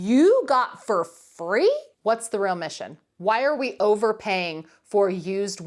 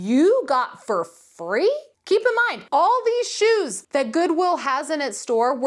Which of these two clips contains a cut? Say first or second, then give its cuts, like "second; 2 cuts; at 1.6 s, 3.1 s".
first; 2 cuts; at 1.9 s, 3.1 s